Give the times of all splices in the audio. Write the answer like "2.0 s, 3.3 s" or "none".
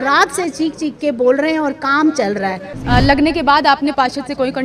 2.7 s